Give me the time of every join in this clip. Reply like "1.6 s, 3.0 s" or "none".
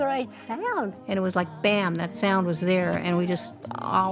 1.0 s